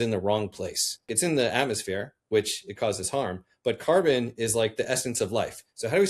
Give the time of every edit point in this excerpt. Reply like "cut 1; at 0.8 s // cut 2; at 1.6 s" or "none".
cut 1; at 1.1 s

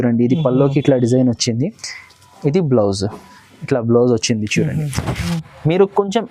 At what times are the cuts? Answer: cut 1; at 5.3 s

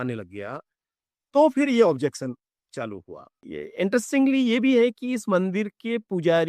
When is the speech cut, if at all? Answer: cut 1; at 3.3 s

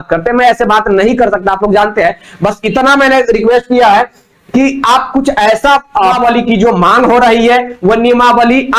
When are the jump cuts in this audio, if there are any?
cut 1; at 6.2 s

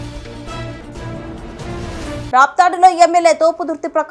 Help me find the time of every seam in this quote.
none

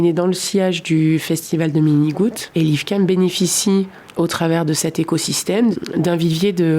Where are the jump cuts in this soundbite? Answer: cut 1; at 2.4 s // cut 2; at 4.0 s // cut 3; at 5.8 s

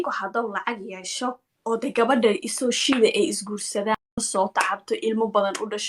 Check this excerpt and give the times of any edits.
cut 1; at 4.3 s

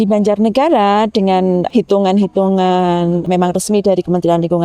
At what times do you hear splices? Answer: cut 1; at 1.7 s // cut 2; at 3.3 s

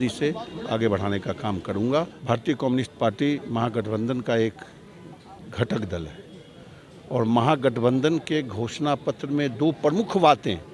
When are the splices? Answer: cut 1; at 2.2 s

